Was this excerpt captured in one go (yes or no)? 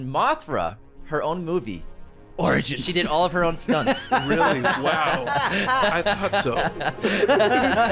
yes